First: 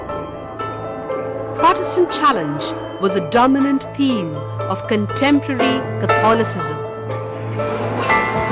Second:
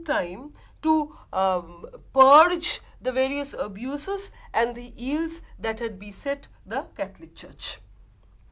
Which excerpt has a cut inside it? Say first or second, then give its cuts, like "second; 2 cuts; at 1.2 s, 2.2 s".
first; 1 cut; at 1.6 s